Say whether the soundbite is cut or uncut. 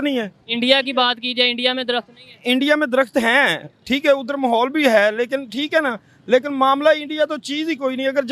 uncut